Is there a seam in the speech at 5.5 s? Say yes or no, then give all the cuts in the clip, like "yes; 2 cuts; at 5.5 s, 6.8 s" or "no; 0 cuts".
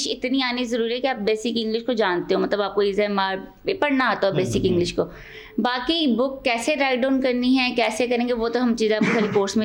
no; 0 cuts